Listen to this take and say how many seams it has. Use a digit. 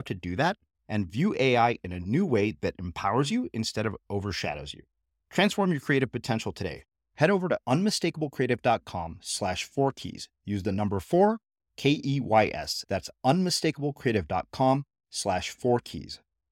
0